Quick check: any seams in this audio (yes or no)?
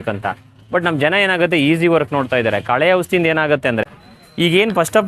yes